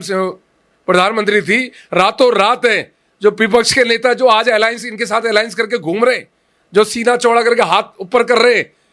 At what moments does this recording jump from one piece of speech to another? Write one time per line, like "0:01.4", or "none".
none

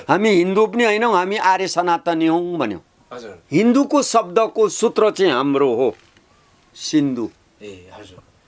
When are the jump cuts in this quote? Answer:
0:03.4

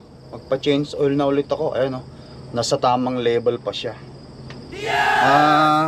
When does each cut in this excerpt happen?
none

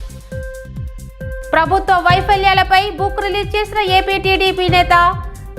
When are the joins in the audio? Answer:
0:01.5

